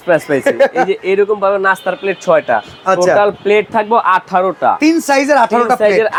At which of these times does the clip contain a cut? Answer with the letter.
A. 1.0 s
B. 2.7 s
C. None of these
C